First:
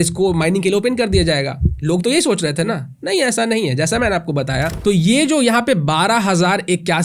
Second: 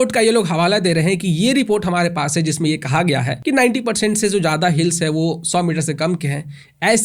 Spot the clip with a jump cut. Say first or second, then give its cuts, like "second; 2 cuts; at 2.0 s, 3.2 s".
first; 1 cut; at 4.7 s